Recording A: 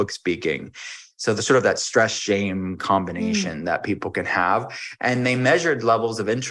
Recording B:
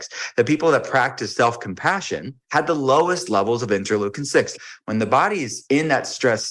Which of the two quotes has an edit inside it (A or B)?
B